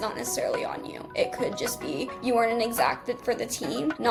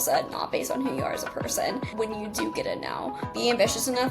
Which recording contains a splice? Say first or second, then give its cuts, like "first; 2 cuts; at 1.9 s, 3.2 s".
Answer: second; 2 cuts; at 1.9 s, 3.4 s